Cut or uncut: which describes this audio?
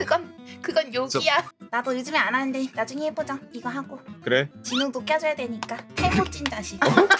cut